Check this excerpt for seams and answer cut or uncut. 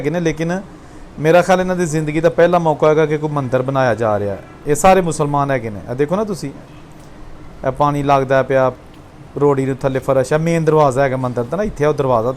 uncut